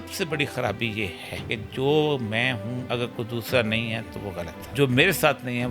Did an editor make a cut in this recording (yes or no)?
yes